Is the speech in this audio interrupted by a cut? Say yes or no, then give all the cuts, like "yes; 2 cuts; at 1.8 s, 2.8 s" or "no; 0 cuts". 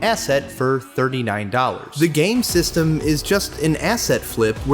yes; 1 cut; at 1.8 s